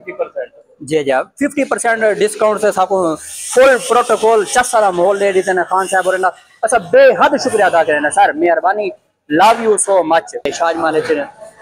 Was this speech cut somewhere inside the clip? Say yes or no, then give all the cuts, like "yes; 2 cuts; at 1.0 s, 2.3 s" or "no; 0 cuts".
yes; 1 cut; at 10.5 s